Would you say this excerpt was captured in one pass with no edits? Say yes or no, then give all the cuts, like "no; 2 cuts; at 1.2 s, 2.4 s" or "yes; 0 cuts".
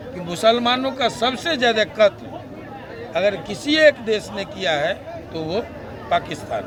yes; 0 cuts